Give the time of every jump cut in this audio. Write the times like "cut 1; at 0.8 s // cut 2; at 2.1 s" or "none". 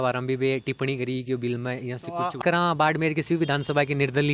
cut 1; at 2.4 s